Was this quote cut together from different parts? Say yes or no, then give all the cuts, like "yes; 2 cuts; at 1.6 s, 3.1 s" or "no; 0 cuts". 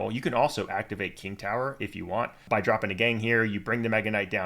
yes; 1 cut; at 2.4 s